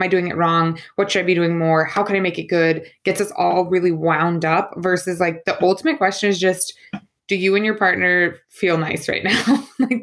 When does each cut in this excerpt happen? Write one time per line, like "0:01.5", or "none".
none